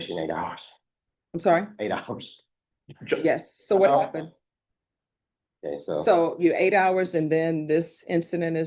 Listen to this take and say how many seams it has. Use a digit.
0